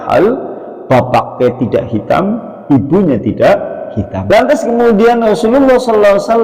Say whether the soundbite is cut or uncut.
cut